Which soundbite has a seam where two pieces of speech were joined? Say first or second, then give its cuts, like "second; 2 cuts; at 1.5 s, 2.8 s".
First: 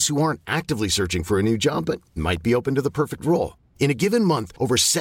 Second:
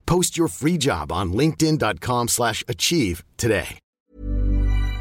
second; 1 cut; at 3.8 s